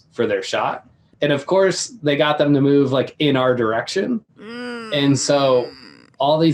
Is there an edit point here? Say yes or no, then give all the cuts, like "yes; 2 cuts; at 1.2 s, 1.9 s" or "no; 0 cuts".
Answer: yes; 1 cut; at 1.0 s